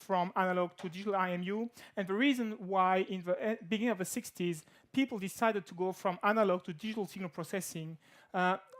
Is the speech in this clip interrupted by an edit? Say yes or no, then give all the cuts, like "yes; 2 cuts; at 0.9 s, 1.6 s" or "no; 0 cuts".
yes; 1 cut; at 2.4 s